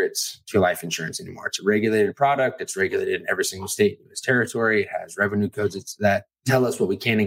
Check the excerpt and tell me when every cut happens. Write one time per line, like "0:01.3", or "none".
0:06.3